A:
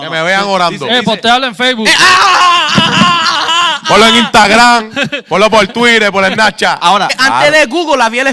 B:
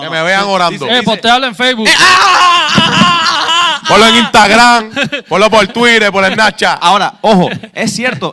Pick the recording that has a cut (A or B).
A